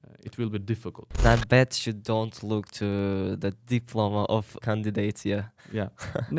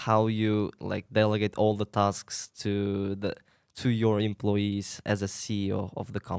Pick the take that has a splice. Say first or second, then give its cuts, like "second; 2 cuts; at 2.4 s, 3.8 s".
first; 2 cuts; at 1.2 s, 4.5 s